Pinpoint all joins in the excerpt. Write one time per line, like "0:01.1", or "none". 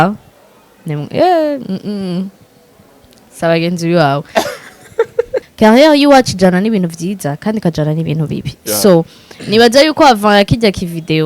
0:05.5